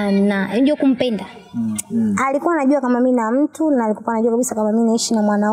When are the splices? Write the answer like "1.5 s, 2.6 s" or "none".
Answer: 1.8 s